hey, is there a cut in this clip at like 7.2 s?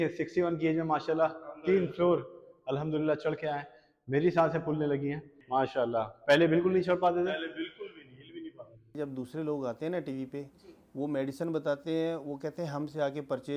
no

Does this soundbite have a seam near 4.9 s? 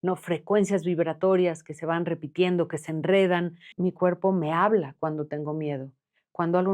no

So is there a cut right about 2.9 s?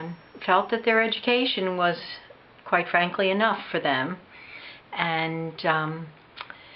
yes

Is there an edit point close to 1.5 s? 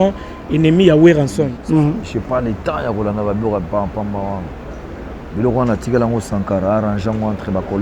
yes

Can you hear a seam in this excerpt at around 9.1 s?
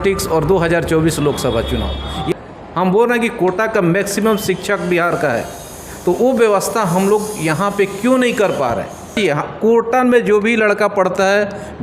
yes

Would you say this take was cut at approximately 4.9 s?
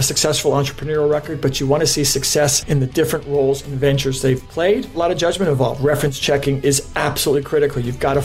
yes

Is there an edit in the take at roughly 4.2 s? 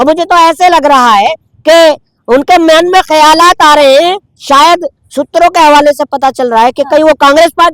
no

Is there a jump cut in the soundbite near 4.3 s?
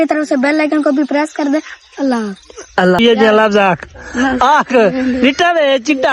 no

